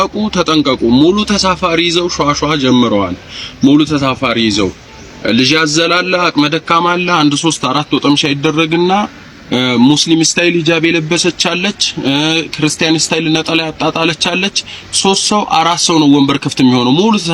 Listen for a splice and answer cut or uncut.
uncut